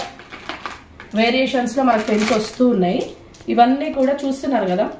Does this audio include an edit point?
no; 0 cuts

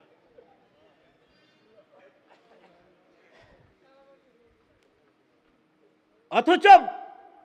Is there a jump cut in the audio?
no; 0 cuts

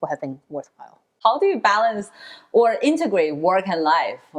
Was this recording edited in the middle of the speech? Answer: yes; 1 cut; at 1.2 s

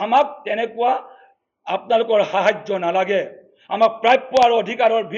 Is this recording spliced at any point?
no; 0 cuts

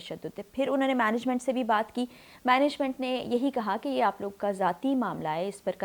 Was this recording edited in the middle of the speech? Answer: no; 0 cuts

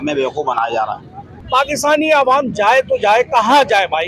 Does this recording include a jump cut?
yes; 1 cut; at 1.3 s

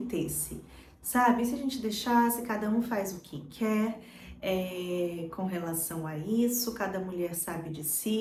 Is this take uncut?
yes; 0 cuts

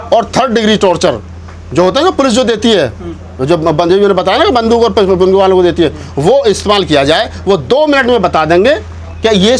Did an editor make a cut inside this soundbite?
no; 0 cuts

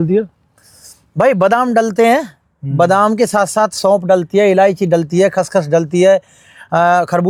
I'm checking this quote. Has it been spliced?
no; 0 cuts

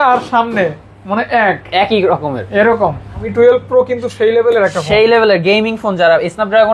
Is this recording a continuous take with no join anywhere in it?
no; 1 cut; at 3.3 s

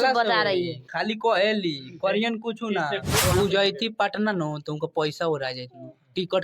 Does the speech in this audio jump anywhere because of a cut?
yes; 1 cut; at 3.2 s

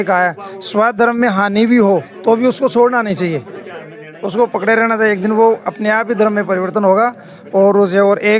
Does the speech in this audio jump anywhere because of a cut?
no; 0 cuts

